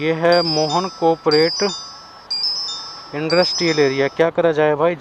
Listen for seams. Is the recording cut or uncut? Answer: uncut